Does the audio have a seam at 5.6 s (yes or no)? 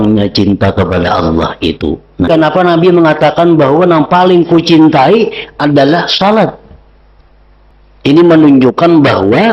no